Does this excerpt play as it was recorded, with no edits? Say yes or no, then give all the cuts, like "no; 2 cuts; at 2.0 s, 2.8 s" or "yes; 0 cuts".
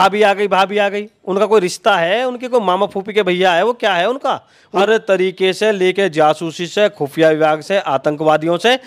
no; 1 cut; at 4.6 s